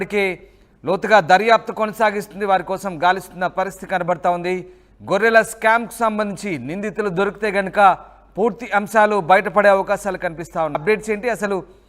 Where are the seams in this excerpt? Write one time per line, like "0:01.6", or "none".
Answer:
0:10.8